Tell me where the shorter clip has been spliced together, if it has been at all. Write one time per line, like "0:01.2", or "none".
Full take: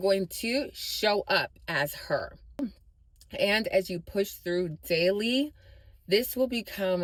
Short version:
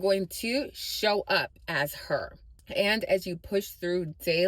0:02.4